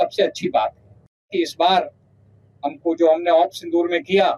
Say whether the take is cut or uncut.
cut